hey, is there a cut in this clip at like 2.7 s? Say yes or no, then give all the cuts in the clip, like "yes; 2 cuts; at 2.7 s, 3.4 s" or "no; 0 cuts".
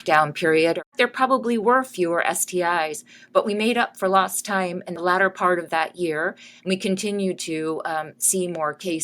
no; 2 cuts; at 0.9 s, 4.9 s